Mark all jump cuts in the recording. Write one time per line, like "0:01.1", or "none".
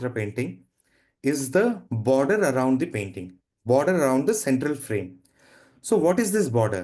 none